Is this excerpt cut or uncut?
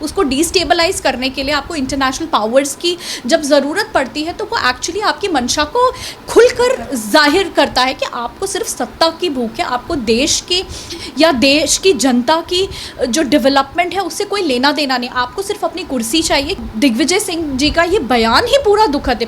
cut